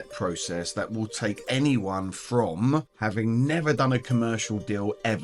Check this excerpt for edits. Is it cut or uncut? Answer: cut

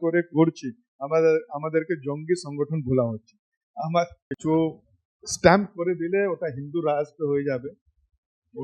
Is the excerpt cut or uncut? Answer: cut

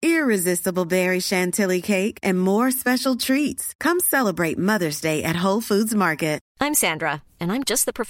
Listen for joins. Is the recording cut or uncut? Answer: cut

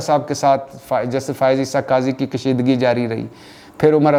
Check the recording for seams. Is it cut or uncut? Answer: uncut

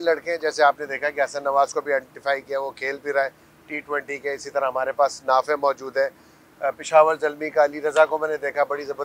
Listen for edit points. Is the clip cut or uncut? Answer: uncut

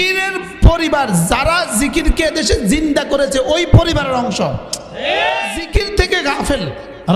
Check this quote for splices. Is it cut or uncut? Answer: cut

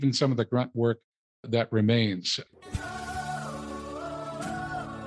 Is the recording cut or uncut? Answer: cut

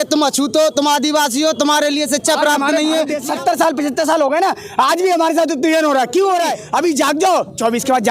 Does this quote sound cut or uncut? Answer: cut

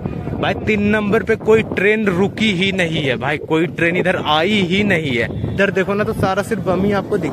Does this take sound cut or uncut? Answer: cut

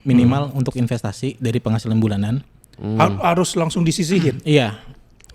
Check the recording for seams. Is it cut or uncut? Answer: uncut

